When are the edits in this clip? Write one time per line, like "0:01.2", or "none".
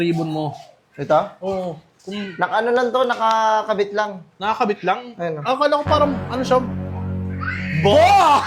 none